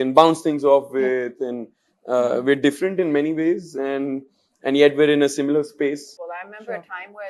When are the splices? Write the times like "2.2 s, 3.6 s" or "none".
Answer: 6.1 s